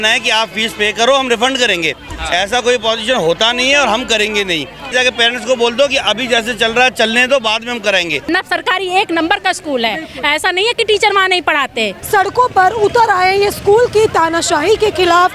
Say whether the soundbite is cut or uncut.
cut